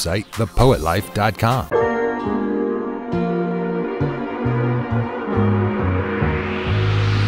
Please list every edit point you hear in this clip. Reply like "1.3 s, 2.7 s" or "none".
1.6 s